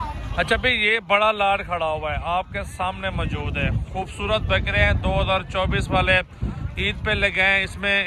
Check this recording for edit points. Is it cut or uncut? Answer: uncut